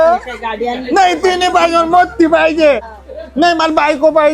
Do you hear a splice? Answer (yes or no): yes